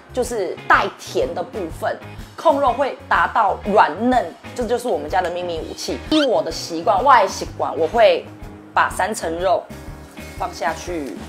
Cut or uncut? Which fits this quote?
cut